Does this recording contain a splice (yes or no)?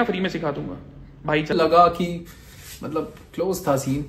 yes